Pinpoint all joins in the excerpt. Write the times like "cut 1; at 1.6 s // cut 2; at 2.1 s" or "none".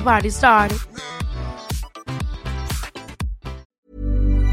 cut 1; at 3.6 s